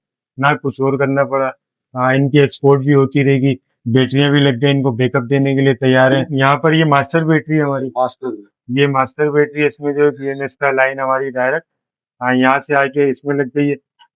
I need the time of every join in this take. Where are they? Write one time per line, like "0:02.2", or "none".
0:06.3